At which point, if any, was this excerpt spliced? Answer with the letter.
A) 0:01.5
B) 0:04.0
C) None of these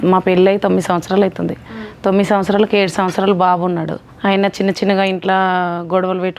B